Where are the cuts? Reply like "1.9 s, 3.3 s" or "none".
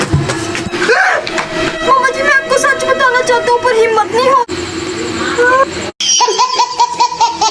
4.5 s